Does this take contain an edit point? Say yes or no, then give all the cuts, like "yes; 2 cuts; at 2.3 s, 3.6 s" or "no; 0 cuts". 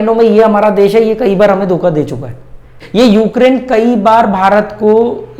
yes; 1 cut; at 2.8 s